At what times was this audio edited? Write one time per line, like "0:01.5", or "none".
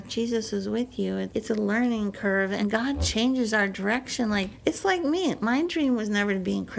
0:02.6
0:04.5